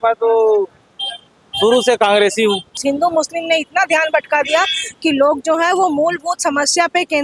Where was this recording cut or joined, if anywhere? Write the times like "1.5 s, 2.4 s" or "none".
2.8 s